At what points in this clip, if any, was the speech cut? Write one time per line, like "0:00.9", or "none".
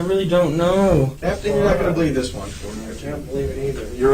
0:01.2